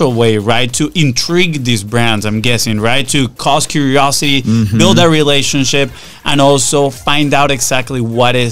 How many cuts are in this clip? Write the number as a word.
zero